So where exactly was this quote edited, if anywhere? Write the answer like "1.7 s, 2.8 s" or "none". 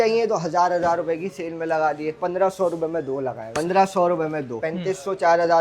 2.2 s, 3.4 s, 4.6 s